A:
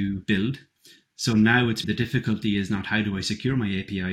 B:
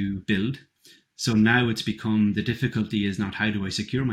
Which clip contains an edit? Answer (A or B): A